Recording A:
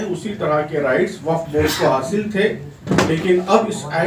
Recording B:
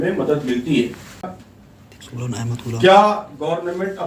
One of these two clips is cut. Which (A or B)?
B